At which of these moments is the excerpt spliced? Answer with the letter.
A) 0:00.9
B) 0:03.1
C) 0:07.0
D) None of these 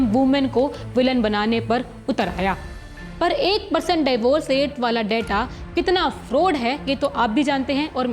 B